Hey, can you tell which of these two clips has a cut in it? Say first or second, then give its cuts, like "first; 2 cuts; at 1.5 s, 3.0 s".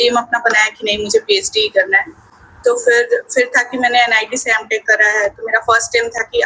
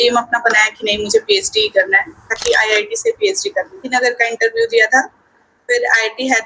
second; 2 cuts; at 2.3 s, 3.8 s